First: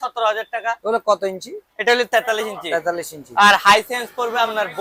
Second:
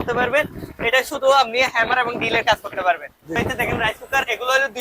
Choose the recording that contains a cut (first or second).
second